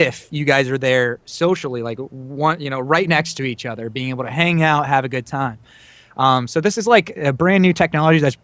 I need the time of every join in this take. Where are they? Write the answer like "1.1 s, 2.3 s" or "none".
1.2 s